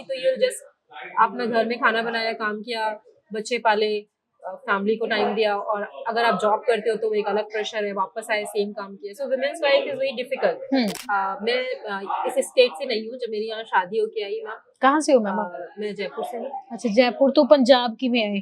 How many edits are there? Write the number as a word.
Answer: one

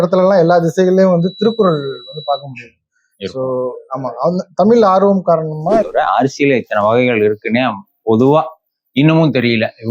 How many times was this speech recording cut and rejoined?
one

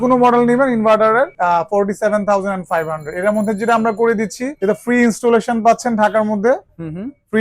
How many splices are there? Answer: two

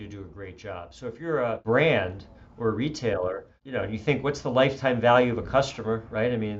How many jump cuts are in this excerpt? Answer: two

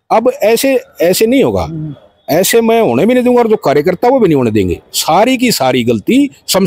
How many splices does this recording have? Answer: zero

